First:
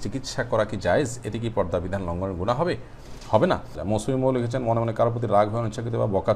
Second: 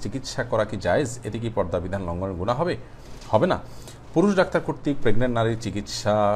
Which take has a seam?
first; 1 cut; at 3.7 s

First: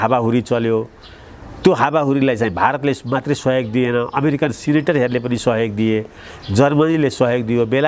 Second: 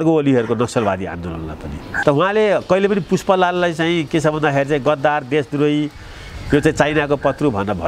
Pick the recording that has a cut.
second; 1 cut; at 1.8 s

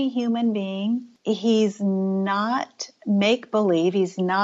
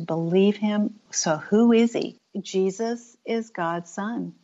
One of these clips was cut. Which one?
first; 1 cut; at 1.1 s

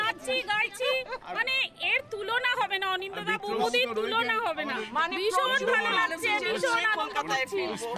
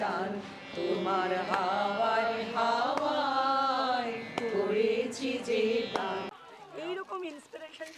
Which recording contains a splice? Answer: second; 1 cut; at 6.3 s

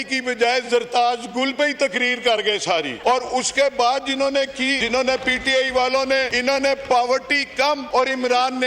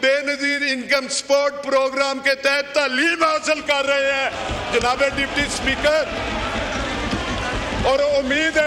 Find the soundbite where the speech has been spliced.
first; 4 cuts; at 2.9 s, 4.8 s, 6.3 s, 7.8 s

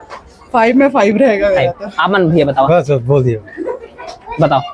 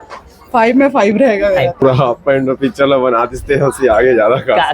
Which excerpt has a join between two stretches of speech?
second; 1 cut; at 1.8 s

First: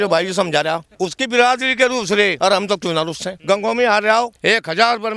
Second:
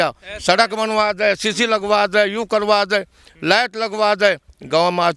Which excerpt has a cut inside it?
first; 4 cuts; at 0.9 s, 2.4 s, 3.3 s, 4.3 s

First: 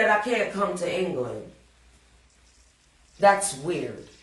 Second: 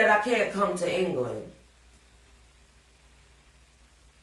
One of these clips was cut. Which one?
first; 1 cut; at 2.2 s

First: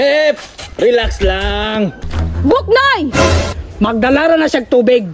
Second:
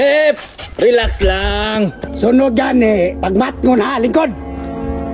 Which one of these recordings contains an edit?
first; 2 cuts; at 2.0 s, 3.5 s

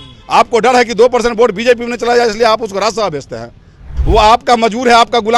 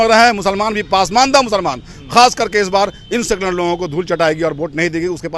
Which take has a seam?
first; 1 cut; at 3.9 s

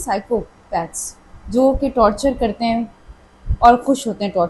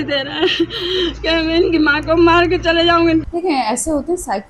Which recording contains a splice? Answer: second; 1 cut; at 3.3 s

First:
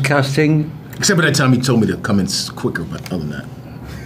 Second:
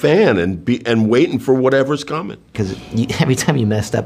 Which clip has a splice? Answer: second; 1 cut; at 2.5 s

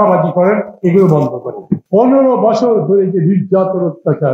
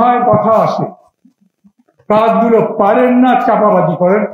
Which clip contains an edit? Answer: first; 1 cut; at 1.8 s

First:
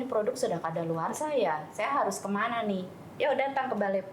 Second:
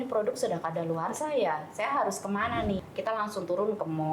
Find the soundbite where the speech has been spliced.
second; 1 cut; at 2.9 s

